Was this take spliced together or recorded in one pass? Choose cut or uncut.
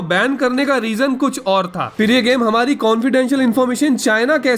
cut